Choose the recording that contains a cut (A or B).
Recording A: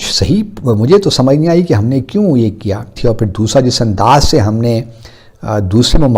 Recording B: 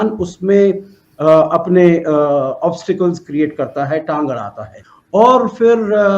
A